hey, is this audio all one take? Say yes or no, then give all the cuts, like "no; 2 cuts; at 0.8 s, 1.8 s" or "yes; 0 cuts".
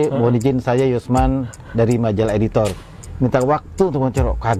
yes; 0 cuts